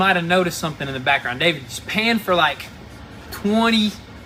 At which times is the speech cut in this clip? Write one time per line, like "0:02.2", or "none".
none

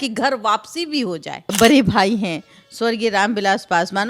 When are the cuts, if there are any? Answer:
0:01.5

